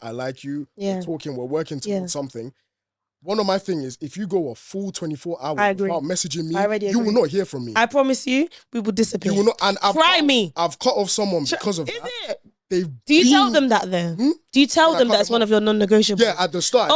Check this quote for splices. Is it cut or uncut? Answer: uncut